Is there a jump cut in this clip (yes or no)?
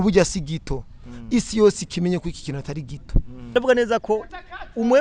yes